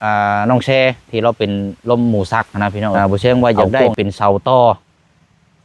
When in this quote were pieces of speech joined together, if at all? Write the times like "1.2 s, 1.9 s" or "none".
3.0 s

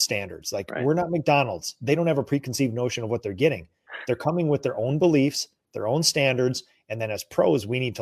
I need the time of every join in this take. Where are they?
none

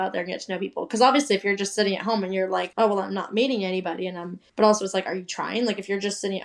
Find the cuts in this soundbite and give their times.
none

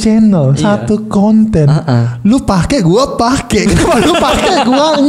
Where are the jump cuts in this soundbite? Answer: none

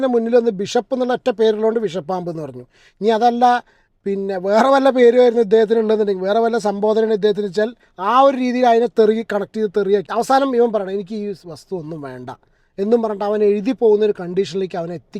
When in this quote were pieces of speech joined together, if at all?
10.1 s

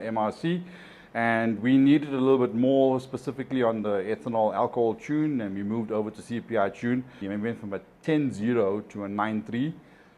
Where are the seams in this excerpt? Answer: 7.2 s

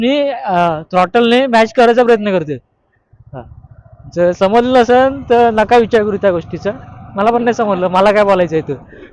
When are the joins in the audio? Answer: none

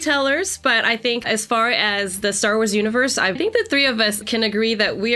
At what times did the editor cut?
1.2 s, 3.4 s

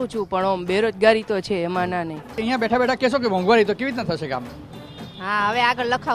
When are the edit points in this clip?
2.4 s

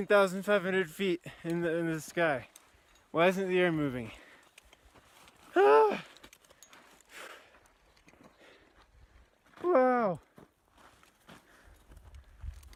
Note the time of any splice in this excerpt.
none

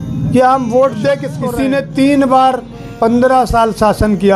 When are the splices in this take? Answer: 1.4 s

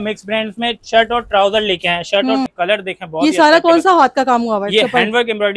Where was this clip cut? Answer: 2.5 s

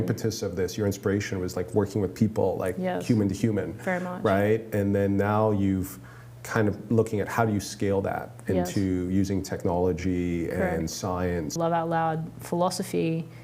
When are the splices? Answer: 11.6 s

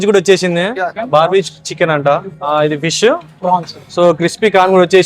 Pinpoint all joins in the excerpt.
1.0 s, 2.3 s, 3.8 s

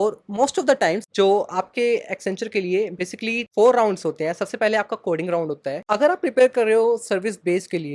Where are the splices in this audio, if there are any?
1.1 s, 5.8 s

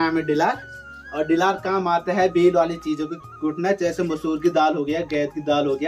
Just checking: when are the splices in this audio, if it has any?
none

